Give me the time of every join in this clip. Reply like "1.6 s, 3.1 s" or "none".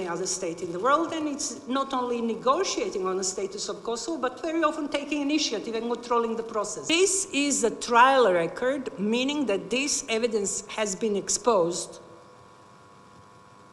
6.9 s